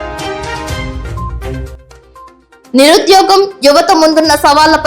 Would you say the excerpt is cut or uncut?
cut